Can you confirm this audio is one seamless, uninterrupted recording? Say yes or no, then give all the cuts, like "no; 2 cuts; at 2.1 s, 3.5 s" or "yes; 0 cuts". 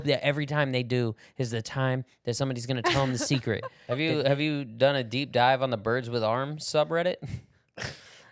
no; 1 cut; at 3.8 s